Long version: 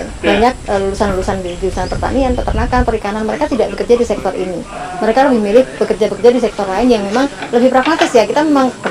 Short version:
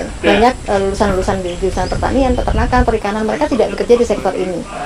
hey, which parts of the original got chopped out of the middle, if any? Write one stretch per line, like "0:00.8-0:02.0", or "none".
none